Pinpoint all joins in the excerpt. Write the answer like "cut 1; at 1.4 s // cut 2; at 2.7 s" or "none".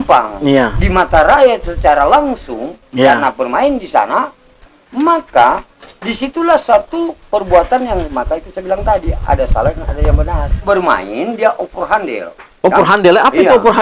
cut 1; at 10.6 s